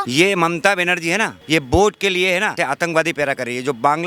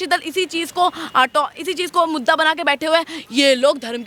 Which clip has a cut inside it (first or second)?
first